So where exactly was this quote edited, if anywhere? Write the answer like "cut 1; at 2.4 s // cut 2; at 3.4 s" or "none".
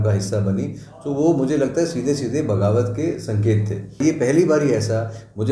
cut 1; at 4.0 s